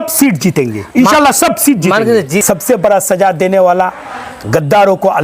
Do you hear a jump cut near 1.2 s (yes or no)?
no